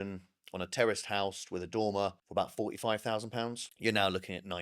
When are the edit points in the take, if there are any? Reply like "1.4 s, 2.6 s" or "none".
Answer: 2.2 s, 3.7 s